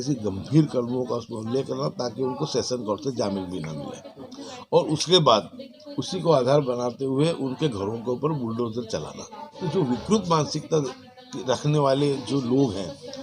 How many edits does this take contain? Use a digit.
1